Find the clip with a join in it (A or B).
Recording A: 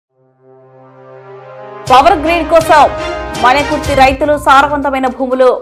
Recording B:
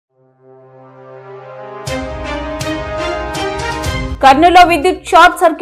A